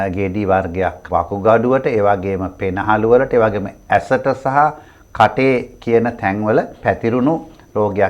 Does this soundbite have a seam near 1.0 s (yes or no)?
yes